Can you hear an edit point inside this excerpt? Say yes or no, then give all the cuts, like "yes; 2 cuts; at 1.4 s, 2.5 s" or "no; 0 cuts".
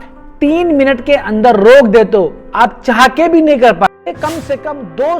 yes; 1 cut; at 3.9 s